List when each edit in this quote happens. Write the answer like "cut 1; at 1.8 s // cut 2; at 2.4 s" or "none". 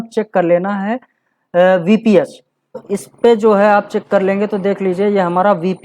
cut 1; at 2.9 s

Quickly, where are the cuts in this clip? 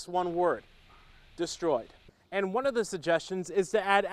cut 1; at 2.0 s

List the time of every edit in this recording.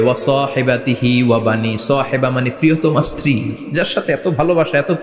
none

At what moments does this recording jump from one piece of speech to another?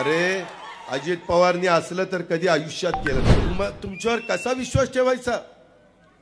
cut 1; at 3.4 s

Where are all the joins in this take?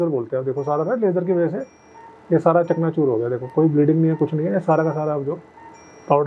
none

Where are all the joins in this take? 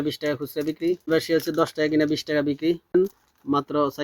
cut 1; at 1.1 s // cut 2; at 3.0 s

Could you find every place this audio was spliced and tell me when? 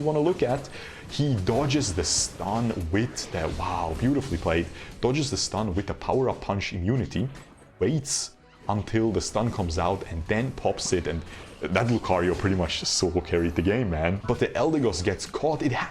cut 1; at 14.2 s

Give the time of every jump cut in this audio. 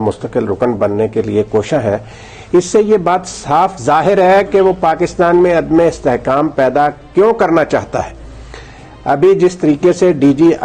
none

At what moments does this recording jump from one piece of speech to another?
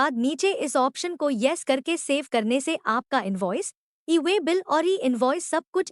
none

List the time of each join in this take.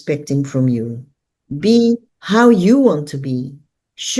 cut 1; at 2.1 s

